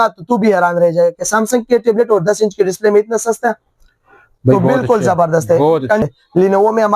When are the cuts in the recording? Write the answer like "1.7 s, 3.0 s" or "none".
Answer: 6.0 s